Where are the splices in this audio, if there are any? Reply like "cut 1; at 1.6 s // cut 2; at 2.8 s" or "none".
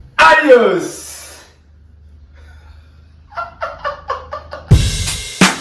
cut 1; at 4.7 s